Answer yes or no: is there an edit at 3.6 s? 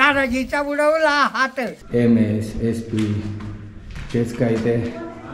no